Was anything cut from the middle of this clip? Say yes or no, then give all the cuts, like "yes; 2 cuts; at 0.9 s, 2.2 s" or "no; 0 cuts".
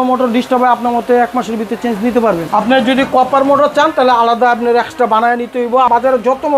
yes; 2 cuts; at 2.4 s, 5.9 s